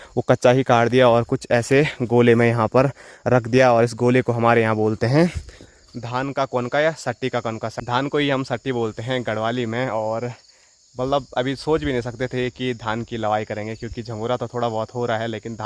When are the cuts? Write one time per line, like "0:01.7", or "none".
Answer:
none